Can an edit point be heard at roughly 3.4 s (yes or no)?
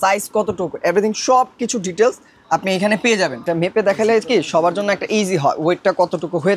yes